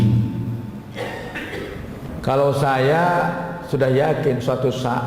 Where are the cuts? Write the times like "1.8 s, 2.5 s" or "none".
2.1 s